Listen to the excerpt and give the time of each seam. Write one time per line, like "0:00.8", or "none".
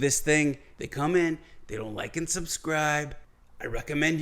none